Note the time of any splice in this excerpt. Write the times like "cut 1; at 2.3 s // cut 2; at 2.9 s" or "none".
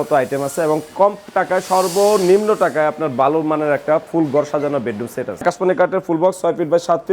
cut 1; at 5.4 s